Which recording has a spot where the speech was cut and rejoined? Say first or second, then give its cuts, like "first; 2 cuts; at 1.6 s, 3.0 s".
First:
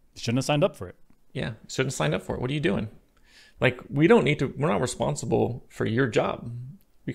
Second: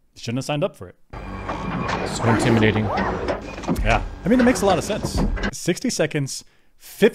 second; 2 cuts; at 1.2 s, 5.5 s